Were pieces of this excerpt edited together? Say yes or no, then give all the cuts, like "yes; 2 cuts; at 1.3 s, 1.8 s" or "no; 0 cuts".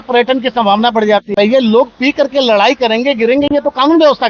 yes; 1 cut; at 1.3 s